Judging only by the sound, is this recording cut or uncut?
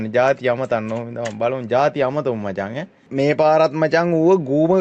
cut